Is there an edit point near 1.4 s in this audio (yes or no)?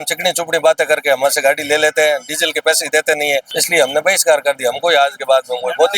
no